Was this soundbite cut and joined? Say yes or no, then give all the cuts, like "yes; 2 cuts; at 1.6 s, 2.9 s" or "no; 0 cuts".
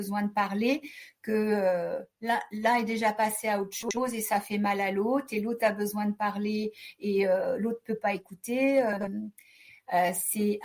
no; 0 cuts